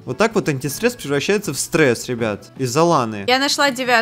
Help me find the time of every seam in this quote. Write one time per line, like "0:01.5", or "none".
0:03.0